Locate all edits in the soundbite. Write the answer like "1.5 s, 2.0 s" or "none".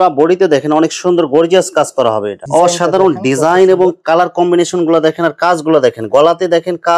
2.4 s

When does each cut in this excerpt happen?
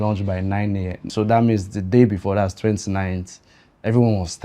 1.0 s

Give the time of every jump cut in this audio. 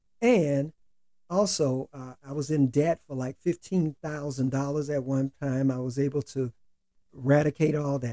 none

